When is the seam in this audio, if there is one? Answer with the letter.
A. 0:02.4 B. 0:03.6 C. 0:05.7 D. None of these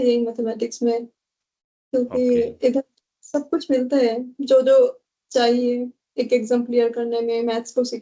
D